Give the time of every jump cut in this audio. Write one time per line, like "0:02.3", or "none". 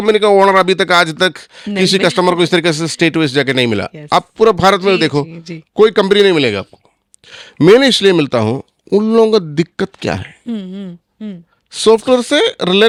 none